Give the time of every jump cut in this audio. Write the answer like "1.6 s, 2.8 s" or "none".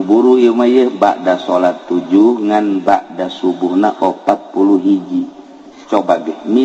none